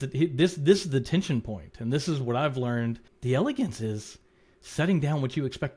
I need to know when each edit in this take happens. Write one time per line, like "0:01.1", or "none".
0:03.1